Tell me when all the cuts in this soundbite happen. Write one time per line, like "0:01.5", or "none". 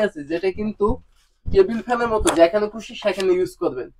none